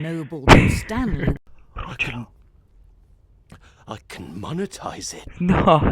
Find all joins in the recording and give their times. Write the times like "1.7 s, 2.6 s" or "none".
1.4 s